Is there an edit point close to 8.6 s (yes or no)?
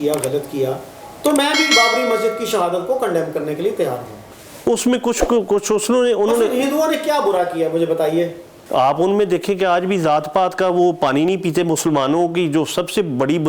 yes